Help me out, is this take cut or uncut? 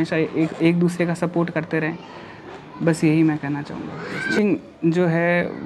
cut